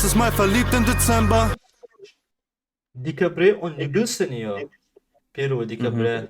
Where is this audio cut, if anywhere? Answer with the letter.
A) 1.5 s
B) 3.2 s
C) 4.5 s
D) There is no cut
A